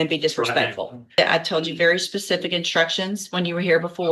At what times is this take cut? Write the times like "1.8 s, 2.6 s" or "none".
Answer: 1.2 s